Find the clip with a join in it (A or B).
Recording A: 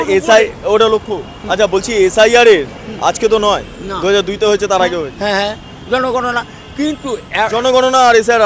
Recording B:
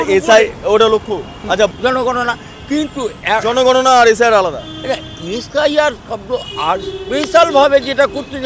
B